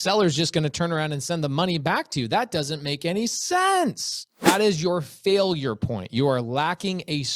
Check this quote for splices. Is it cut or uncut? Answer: cut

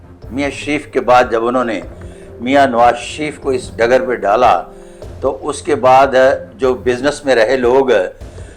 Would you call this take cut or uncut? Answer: uncut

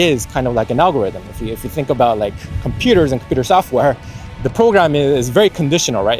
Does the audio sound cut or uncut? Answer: uncut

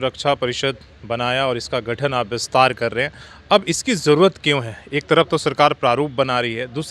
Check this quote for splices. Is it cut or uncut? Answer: uncut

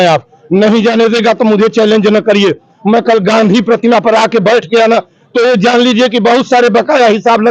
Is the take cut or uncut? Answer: uncut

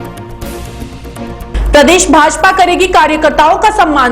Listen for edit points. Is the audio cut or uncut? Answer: cut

